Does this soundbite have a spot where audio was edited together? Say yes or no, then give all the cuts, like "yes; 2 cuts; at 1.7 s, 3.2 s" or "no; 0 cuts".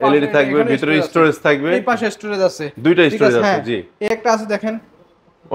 no; 0 cuts